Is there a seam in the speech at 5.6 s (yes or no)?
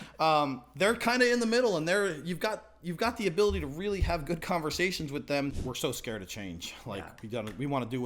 yes